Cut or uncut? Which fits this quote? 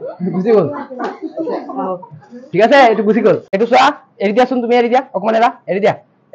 cut